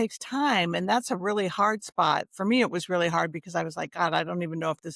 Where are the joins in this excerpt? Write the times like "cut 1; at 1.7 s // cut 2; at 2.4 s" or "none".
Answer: none